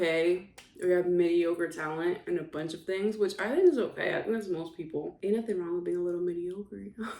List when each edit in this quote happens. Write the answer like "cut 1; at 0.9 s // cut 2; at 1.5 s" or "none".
cut 1; at 5.1 s